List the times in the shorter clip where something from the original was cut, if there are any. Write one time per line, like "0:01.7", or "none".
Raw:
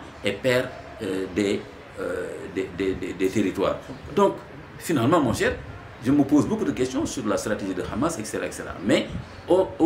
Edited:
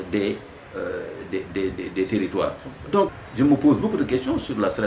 0:03.2